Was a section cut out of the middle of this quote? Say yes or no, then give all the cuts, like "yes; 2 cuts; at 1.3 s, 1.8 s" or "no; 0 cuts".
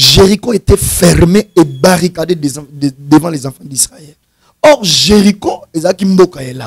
no; 0 cuts